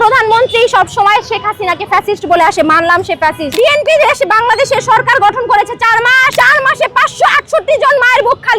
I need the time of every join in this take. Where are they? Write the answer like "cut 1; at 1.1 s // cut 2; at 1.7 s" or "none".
cut 1; at 3.5 s // cut 2; at 6.3 s